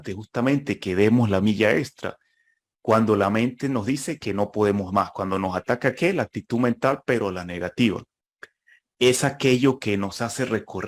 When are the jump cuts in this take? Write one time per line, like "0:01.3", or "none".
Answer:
none